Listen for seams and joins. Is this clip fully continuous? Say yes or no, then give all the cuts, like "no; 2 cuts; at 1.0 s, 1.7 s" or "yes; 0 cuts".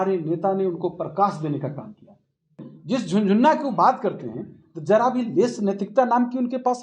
no; 1 cut; at 2.7 s